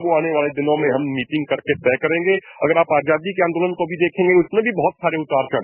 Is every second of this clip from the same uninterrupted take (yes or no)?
yes